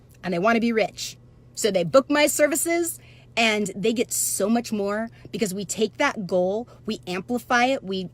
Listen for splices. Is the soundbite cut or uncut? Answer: uncut